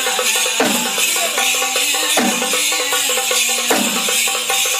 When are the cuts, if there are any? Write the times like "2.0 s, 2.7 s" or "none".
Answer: none